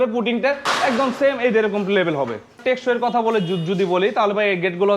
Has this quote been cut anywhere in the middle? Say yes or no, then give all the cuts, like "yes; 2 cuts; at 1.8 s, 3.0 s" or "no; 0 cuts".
yes; 1 cut; at 2.6 s